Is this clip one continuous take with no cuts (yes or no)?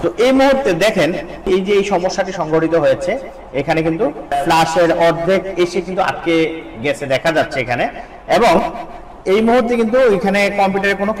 no